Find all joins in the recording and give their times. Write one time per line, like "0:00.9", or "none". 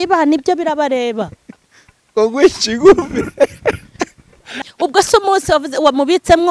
0:04.6